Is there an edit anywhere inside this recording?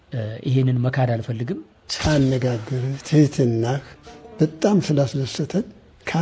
yes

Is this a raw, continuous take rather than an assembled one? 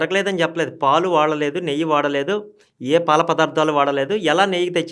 yes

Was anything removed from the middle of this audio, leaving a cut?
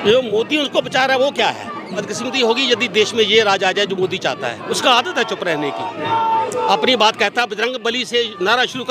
yes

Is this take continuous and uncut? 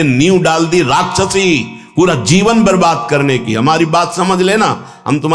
yes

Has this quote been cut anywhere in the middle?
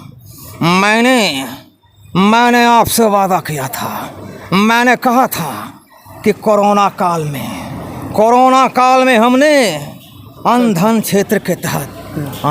no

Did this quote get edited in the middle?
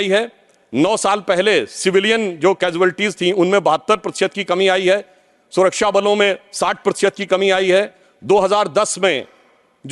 no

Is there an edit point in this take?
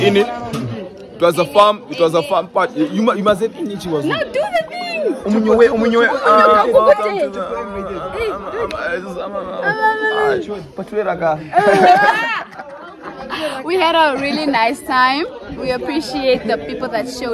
no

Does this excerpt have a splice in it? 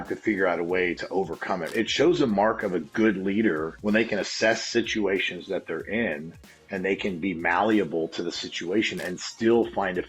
yes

